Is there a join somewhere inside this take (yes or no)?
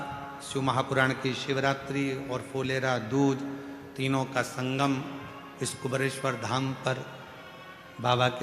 no